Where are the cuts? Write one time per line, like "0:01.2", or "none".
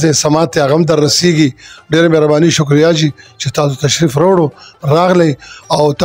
none